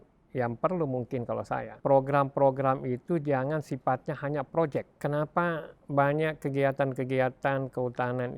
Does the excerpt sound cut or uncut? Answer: cut